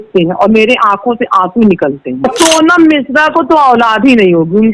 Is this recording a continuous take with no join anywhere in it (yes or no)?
no